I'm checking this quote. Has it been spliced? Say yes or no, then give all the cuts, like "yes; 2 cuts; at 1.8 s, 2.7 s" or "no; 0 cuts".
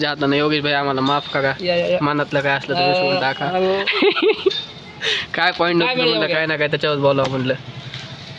no; 0 cuts